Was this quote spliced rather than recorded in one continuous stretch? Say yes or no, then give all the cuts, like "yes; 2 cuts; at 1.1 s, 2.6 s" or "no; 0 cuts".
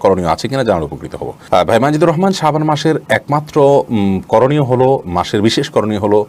no; 0 cuts